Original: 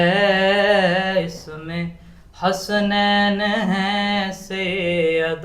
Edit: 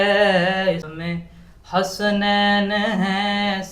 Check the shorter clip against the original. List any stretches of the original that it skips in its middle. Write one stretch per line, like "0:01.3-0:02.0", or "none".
0:01.4-0:01.6